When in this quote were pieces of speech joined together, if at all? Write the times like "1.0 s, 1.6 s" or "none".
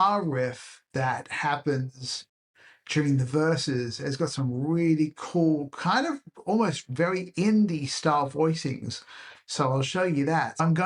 none